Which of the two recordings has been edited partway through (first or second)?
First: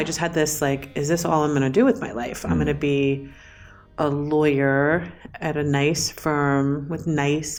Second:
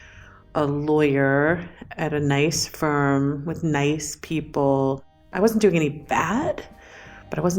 second